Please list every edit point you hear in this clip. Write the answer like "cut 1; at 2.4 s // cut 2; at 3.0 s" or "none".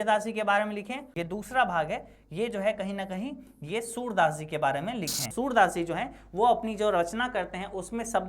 cut 1; at 1.1 s // cut 2; at 5.3 s